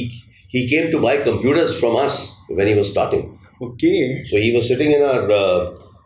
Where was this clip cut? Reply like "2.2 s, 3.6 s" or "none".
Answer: none